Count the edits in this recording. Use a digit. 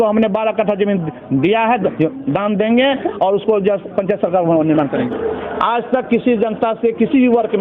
1